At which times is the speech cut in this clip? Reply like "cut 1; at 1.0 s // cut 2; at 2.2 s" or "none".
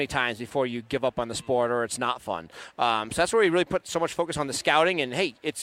none